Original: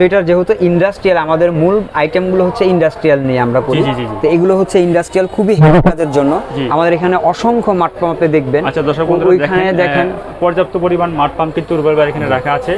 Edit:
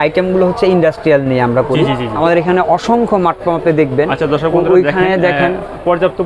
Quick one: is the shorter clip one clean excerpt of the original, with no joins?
no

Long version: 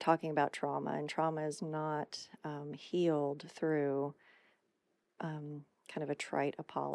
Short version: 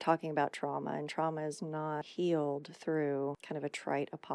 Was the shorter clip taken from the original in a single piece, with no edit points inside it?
no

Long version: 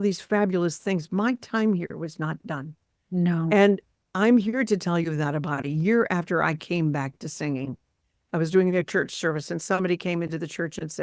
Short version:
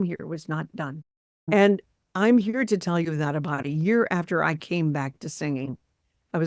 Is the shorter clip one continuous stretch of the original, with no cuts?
no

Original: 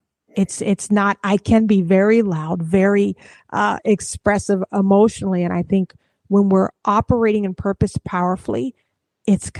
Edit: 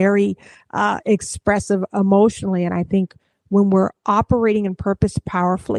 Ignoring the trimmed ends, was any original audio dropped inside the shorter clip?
no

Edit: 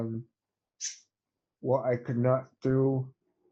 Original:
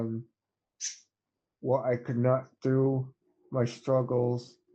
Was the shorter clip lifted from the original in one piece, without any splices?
yes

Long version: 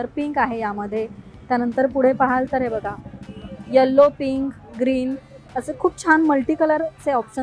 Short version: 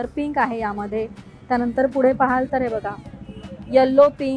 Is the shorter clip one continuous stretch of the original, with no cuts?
yes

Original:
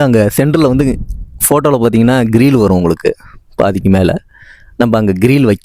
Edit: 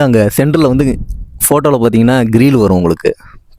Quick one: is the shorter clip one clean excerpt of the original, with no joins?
yes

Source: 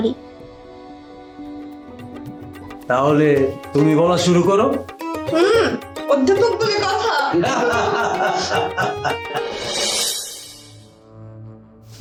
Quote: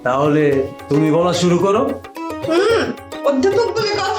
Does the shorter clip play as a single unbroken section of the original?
yes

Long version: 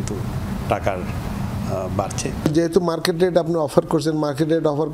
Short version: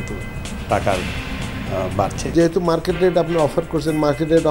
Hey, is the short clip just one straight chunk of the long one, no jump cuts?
no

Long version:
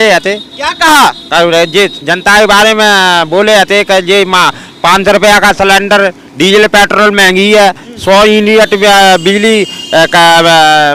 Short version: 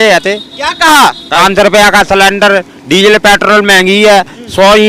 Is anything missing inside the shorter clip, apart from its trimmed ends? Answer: yes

